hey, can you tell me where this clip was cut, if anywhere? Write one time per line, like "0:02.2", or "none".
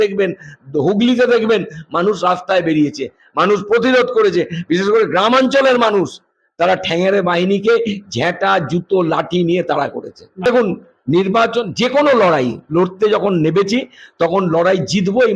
0:10.5